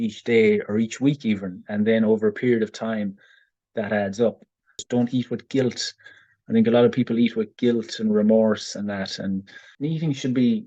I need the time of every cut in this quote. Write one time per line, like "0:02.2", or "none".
0:04.8
0:09.6